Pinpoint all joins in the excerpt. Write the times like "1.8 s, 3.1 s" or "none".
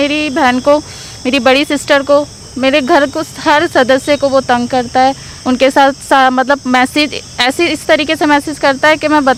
none